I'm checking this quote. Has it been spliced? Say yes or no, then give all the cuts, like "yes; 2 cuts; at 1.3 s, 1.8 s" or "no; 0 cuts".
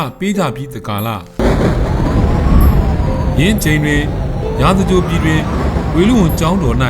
yes; 1 cut; at 1.3 s